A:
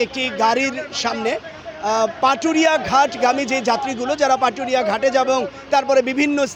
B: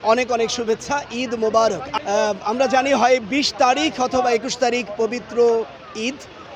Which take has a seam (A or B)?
B